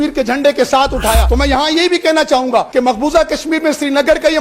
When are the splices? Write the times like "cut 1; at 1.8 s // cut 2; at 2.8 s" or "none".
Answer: cut 1; at 1.2 s // cut 2; at 2.7 s

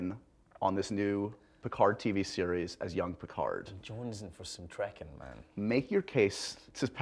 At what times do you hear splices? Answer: none

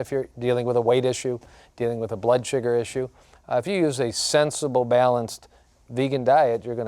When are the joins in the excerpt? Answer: none

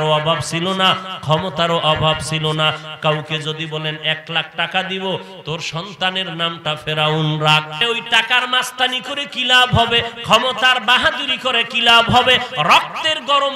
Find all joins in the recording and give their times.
cut 1; at 2.9 s // cut 2; at 7.8 s

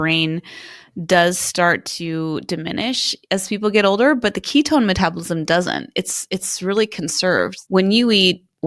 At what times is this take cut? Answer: cut 1; at 7.6 s

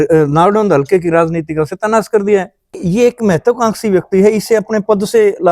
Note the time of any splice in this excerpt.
cut 1; at 2.7 s

